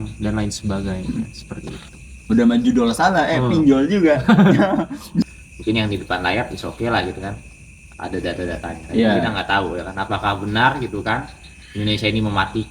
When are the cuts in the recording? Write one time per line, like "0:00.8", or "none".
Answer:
0:05.3